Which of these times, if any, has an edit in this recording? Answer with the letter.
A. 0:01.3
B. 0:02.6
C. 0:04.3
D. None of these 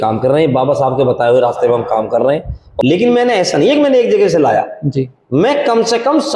B